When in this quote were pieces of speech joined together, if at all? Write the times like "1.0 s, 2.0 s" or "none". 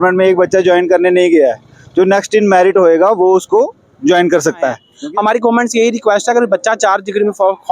4.9 s